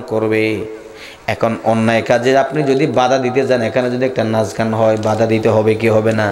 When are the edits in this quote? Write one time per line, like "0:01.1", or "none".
none